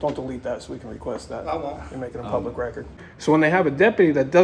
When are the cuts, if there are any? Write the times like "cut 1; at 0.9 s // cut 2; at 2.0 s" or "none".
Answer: cut 1; at 2.9 s